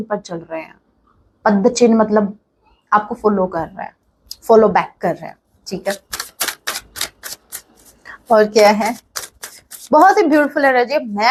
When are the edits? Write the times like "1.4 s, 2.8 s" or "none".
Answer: none